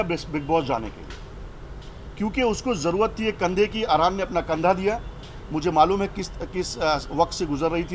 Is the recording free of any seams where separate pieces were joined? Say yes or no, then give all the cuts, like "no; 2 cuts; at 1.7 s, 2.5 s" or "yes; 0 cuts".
yes; 0 cuts